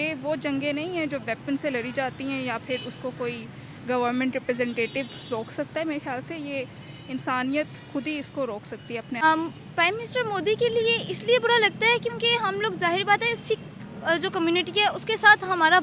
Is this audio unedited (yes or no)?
no